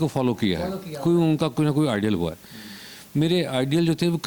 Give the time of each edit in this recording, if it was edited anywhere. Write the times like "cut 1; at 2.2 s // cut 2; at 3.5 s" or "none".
none